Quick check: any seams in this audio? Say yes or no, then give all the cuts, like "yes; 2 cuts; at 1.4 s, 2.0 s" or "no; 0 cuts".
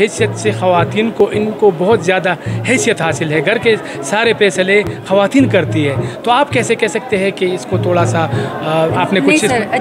no; 0 cuts